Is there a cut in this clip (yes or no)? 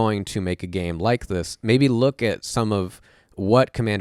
no